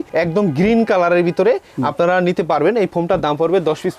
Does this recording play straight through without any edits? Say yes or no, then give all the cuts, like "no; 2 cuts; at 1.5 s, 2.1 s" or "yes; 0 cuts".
yes; 0 cuts